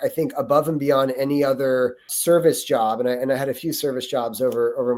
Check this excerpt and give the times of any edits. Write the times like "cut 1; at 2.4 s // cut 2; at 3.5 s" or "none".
cut 1; at 2.1 s